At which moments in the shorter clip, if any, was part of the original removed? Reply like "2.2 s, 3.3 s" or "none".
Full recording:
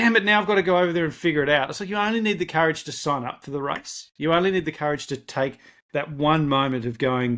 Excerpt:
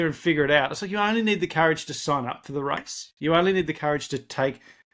none